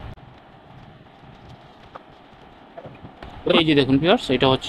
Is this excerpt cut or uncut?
cut